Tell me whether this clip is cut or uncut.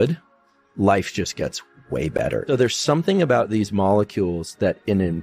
cut